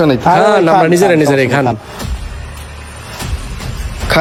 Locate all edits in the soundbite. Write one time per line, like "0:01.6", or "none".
none